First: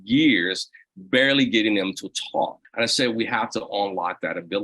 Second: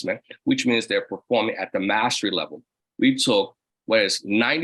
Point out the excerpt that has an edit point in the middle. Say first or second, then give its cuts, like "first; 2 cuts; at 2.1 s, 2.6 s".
first; 1 cut; at 2.6 s